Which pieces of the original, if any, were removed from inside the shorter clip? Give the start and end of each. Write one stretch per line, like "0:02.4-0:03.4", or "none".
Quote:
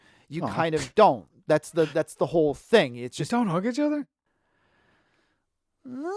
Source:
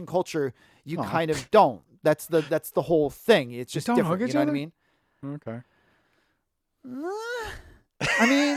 0:05.2-0:05.6

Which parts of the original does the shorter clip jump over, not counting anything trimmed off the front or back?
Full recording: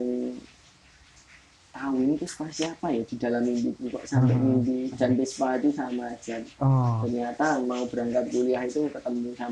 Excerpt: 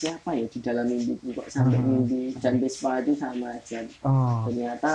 none

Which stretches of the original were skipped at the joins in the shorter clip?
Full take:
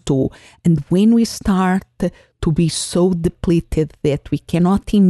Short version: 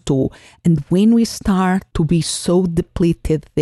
0:01.9-0:02.3

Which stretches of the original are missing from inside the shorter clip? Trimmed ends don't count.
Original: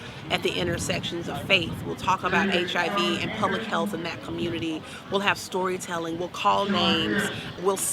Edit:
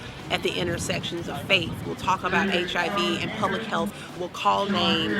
0:04.1-0:06.1

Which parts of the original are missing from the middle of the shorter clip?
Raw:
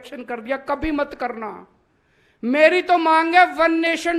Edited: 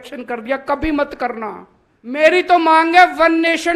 0:02.2-0:02.6

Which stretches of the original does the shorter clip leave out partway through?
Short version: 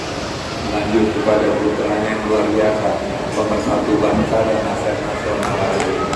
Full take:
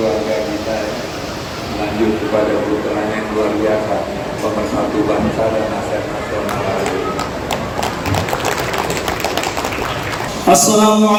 none

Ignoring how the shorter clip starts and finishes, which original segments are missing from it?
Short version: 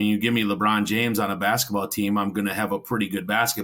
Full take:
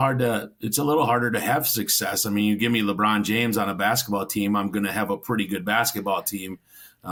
none

